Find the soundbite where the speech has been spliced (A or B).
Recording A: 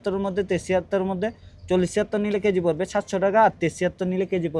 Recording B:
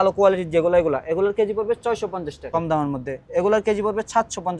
B